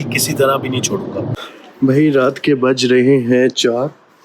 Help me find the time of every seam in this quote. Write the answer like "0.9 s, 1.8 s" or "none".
1.3 s